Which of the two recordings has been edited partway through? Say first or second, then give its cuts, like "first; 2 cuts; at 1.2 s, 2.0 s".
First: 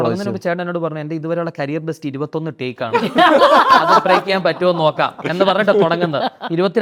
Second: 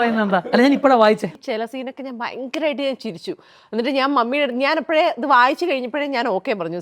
second; 1 cut; at 1.3 s